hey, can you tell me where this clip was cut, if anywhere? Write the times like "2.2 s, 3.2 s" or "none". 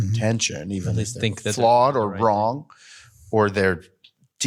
none